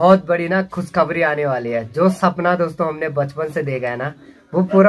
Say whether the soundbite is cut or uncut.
uncut